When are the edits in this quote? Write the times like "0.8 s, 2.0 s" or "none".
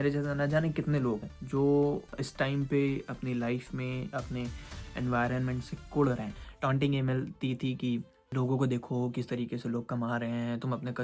1.3 s, 2.2 s, 4.1 s, 6.4 s, 8.2 s